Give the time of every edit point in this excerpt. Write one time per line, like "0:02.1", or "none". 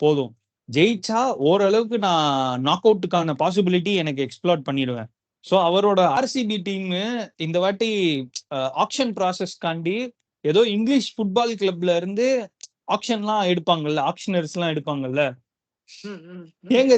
0:06.2